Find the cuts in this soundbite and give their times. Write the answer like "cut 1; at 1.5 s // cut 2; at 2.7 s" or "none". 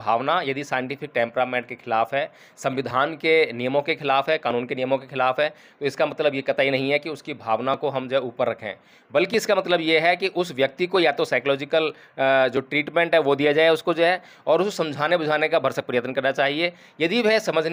none